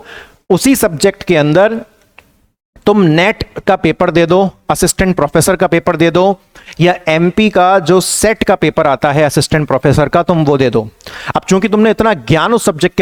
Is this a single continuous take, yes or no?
yes